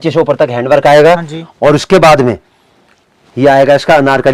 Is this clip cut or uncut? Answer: uncut